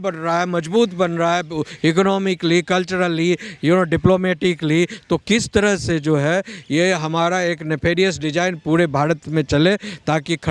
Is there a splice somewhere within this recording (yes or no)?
no